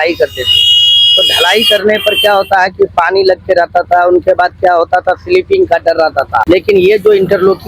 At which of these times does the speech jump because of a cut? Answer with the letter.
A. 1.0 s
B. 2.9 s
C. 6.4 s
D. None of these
C